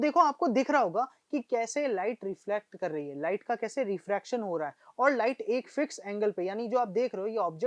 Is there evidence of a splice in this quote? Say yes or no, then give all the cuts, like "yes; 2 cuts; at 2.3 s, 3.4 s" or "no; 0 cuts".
no; 0 cuts